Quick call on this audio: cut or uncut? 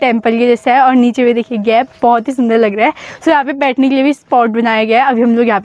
uncut